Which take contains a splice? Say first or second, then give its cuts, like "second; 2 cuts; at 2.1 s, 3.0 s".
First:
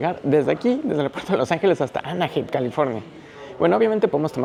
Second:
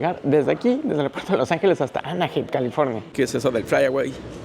second; 1 cut; at 3.1 s